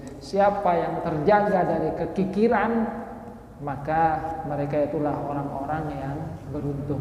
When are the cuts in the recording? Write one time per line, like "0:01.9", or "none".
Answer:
none